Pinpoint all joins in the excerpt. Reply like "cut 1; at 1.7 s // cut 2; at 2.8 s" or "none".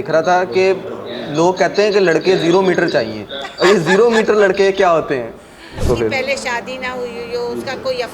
cut 1; at 5.8 s